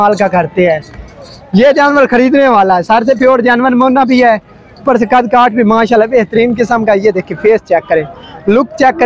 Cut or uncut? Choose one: uncut